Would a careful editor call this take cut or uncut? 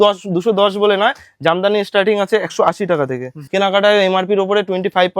cut